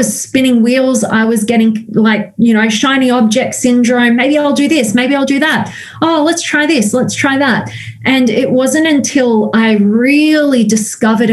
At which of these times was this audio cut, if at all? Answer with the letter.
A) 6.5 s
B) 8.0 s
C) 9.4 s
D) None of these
D